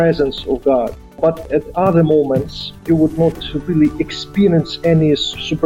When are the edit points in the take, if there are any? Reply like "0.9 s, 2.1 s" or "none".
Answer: 1.2 s, 2.9 s

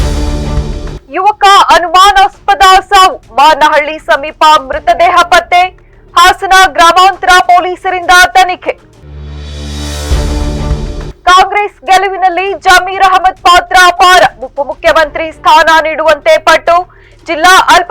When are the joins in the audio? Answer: 0.9 s

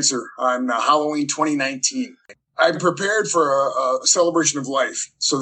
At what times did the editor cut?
2.7 s

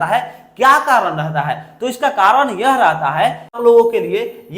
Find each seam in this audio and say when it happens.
3.6 s

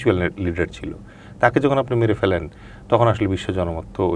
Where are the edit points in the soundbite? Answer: none

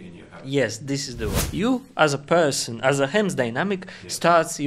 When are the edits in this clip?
1.4 s

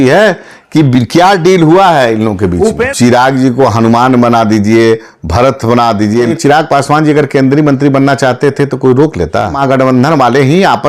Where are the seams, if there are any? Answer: 2.9 s, 6.3 s, 9.6 s

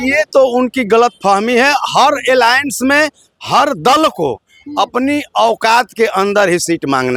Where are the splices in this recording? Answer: none

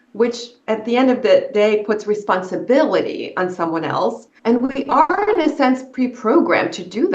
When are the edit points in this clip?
4.3 s

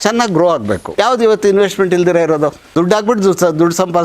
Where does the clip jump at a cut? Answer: 0.9 s, 2.7 s

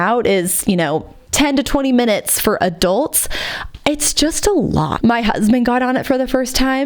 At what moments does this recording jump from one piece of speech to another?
1.2 s, 4.9 s

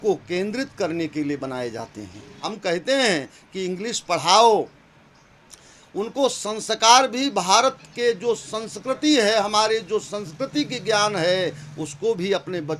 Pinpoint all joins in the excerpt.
2.4 s

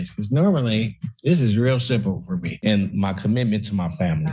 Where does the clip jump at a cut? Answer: 2.5 s

